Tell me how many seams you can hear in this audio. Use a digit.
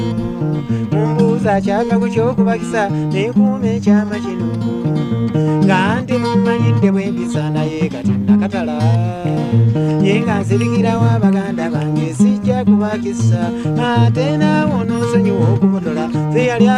0